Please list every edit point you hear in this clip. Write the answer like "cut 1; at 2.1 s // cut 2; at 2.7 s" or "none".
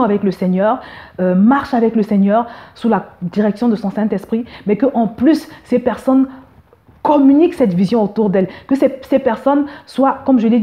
none

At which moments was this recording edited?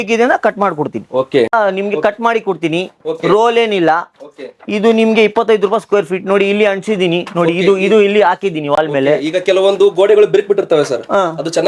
none

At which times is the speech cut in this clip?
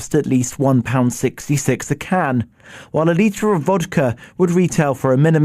cut 1; at 2.0 s

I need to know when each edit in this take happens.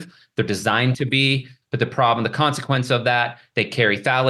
cut 1; at 1.6 s

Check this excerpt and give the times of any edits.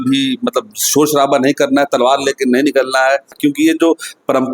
cut 1; at 3.4 s

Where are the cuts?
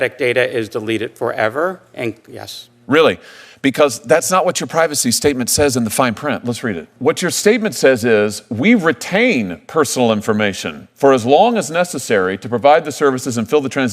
cut 1; at 6.9 s

